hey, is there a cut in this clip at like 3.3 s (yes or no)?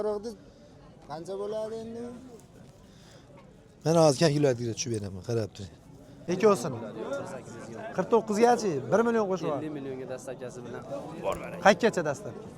no